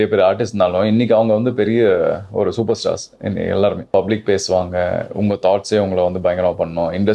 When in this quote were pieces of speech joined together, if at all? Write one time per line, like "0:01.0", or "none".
0:03.9